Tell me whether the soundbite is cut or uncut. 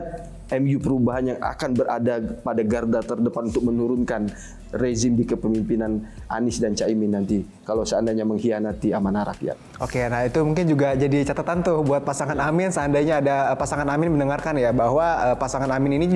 uncut